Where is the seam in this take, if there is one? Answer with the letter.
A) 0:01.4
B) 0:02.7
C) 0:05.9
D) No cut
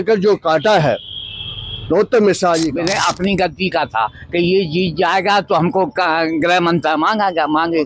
B